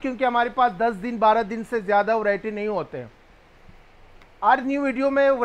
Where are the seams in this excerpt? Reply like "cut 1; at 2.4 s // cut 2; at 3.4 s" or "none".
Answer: none